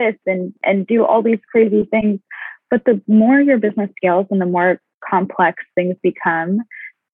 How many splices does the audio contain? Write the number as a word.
one